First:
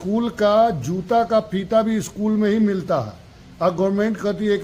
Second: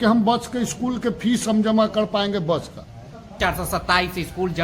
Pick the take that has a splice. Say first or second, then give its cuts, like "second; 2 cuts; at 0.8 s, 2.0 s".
second; 1 cut; at 3.4 s